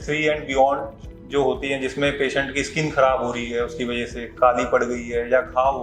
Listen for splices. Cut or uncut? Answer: uncut